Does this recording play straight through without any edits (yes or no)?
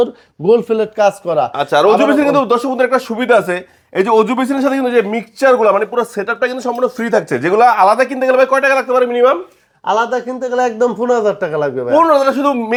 yes